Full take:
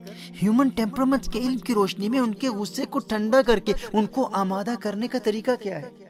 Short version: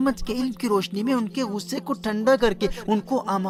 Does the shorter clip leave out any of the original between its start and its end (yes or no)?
no